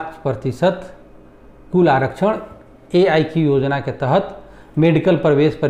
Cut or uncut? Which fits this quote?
uncut